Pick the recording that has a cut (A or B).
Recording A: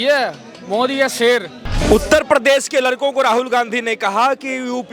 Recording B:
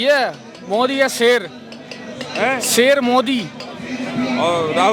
A